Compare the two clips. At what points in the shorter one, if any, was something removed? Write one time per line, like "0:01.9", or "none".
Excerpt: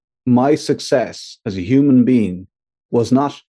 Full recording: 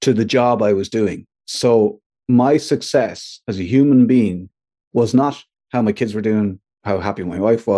none